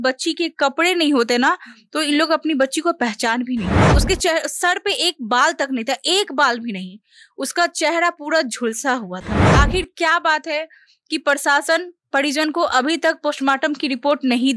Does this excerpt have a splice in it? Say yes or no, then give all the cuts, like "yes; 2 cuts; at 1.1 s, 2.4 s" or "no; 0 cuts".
yes; 2 cuts; at 3.9 s, 9.5 s